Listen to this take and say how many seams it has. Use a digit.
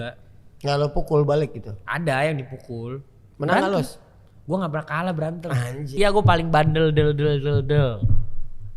1